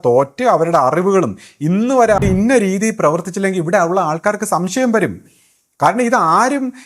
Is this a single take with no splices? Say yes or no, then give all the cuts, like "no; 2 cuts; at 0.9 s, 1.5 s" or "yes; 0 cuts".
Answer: no; 1 cut; at 2.2 s